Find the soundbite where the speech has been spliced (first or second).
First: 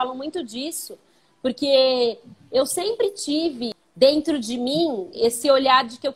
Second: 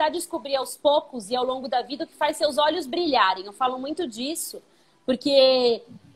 first